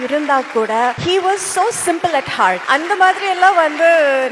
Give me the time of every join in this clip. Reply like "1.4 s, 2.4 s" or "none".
1.0 s, 2.6 s